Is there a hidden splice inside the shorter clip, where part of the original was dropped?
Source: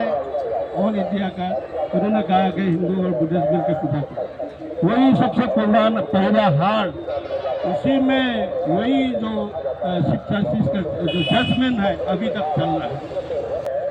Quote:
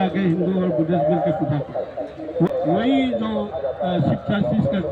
yes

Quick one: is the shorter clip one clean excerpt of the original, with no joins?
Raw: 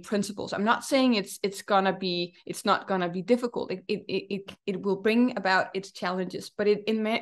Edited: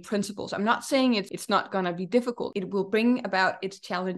no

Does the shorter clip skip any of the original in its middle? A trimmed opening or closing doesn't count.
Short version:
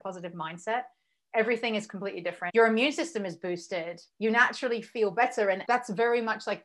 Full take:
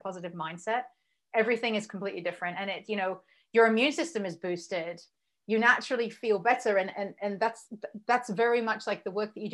yes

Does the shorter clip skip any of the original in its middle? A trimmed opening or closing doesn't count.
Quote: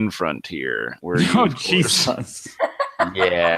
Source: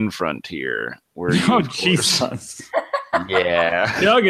yes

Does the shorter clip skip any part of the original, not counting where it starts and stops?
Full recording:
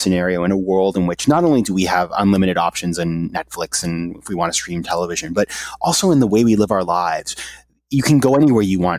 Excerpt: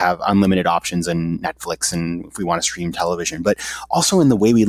no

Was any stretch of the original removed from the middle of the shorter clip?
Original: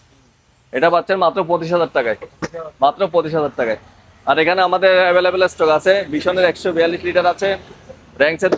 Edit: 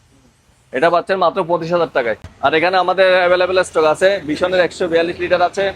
yes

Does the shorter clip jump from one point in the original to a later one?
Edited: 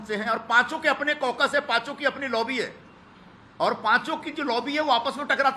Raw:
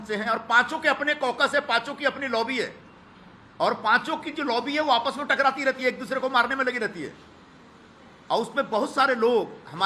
no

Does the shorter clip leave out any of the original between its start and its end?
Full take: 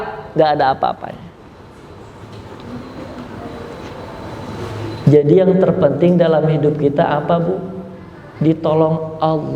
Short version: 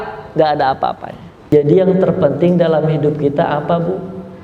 yes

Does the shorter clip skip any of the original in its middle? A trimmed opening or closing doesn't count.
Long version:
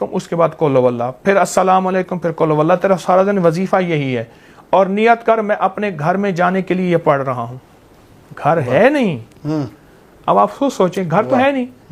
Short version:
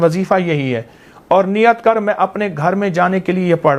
no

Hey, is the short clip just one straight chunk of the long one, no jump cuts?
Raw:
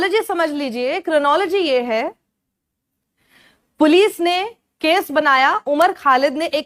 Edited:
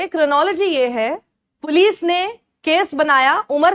no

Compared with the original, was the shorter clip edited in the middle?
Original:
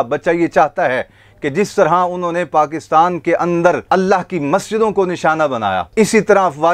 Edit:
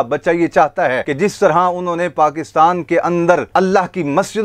yes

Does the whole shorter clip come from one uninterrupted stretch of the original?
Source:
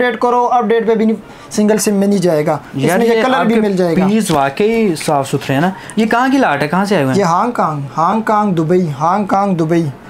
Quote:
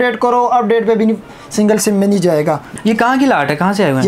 no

